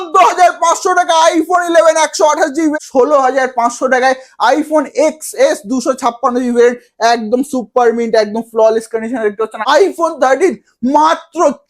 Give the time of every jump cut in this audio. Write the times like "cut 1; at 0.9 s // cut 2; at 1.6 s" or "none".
cut 1; at 2.7 s // cut 2; at 9.6 s